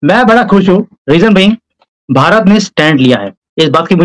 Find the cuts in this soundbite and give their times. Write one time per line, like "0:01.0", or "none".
0:00.9